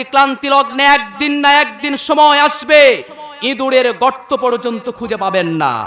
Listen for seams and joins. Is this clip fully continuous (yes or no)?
yes